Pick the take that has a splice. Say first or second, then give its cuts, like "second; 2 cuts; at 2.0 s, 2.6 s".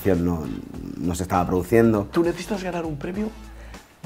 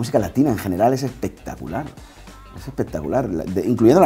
first; 1 cut; at 2.1 s